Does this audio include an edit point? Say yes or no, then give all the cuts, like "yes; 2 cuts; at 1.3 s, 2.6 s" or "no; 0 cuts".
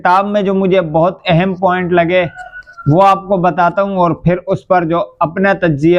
no; 0 cuts